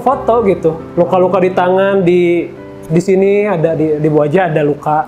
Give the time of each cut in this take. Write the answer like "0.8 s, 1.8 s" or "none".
none